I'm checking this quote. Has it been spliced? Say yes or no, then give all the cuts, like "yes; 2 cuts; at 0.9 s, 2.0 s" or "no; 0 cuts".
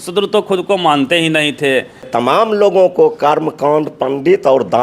yes; 1 cut; at 2.4 s